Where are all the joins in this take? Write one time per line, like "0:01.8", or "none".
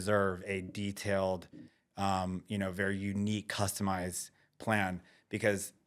none